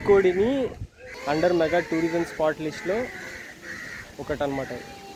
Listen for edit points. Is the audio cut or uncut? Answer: uncut